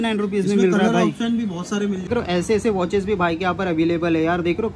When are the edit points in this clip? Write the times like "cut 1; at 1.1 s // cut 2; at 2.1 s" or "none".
cut 1; at 2.1 s